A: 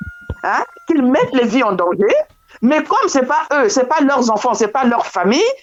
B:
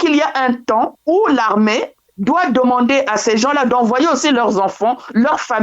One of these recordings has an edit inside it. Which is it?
B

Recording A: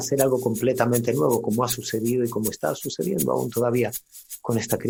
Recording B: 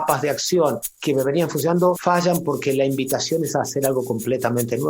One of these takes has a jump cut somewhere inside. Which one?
B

